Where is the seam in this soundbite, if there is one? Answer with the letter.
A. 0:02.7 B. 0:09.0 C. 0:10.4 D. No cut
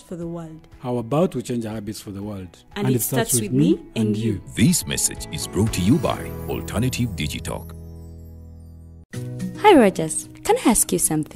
B